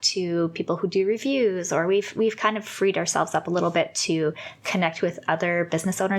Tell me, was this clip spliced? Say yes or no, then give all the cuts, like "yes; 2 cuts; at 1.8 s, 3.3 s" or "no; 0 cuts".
no; 0 cuts